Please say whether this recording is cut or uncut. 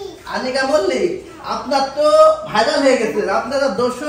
uncut